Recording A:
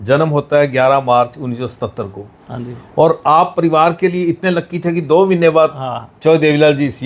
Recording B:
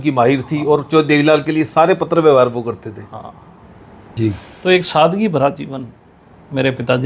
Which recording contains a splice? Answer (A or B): B